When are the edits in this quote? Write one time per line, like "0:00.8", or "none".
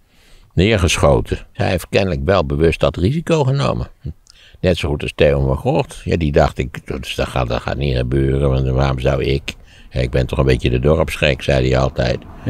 0:01.6